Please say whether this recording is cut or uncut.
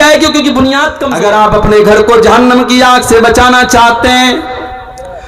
cut